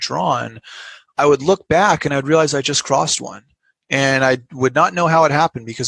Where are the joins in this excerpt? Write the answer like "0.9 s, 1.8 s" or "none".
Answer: none